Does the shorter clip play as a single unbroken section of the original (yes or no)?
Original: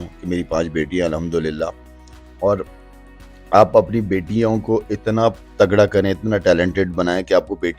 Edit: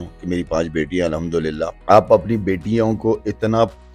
no